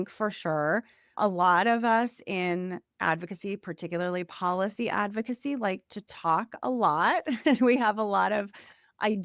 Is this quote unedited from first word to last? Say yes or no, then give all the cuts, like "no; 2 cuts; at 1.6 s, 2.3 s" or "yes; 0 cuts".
no; 1 cut; at 1.1 s